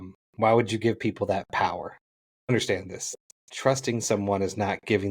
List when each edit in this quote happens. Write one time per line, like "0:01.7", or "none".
0:02.5